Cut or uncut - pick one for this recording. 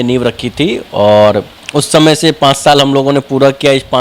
uncut